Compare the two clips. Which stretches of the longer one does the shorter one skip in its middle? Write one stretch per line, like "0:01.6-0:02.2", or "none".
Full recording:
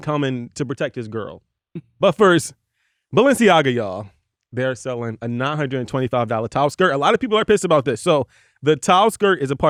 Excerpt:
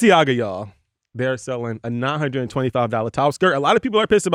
none